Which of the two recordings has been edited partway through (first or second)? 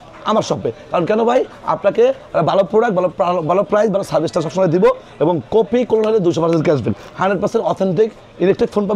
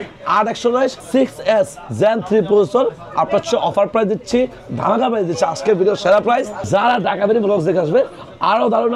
second